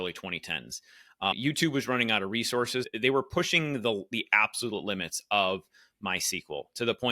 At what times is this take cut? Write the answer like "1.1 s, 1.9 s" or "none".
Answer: 2.9 s

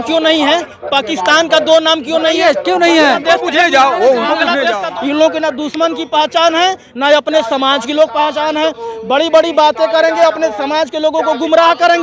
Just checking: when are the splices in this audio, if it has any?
4.8 s

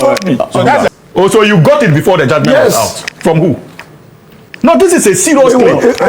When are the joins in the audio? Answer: 0.9 s

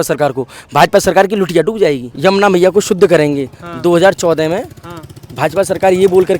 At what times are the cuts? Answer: 2.1 s

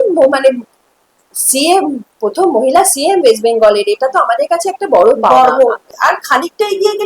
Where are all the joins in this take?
5.9 s

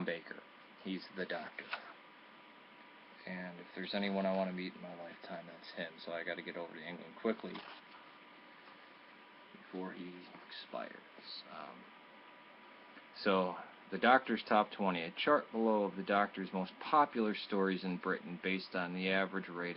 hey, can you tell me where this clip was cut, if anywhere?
1.5 s

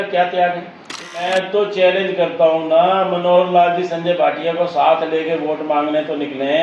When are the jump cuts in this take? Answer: 1.1 s

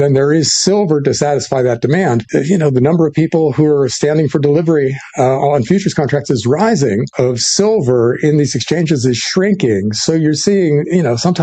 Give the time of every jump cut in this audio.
2.3 s, 7.1 s

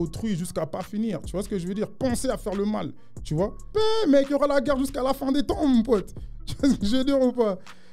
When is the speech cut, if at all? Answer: 3.7 s

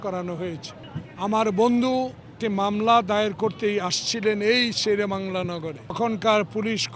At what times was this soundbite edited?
2.3 s, 5.9 s

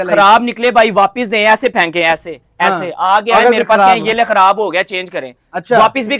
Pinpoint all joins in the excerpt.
none

